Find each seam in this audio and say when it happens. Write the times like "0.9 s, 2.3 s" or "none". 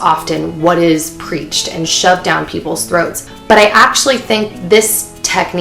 3.2 s